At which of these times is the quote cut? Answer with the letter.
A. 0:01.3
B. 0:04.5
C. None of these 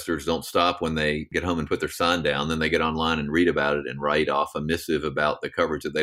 A